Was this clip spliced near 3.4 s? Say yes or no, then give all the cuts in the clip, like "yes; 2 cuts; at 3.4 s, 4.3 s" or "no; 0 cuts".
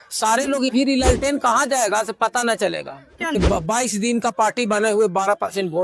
yes; 2 cuts; at 0.7 s, 3.4 s